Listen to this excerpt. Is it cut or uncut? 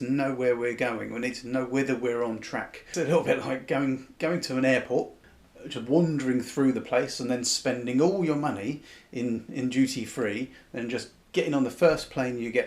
cut